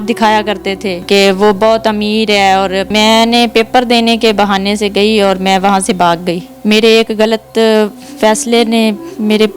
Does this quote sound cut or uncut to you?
cut